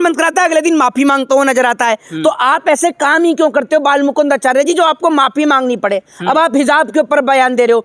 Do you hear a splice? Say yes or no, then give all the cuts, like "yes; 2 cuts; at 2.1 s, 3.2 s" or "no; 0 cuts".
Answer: no; 0 cuts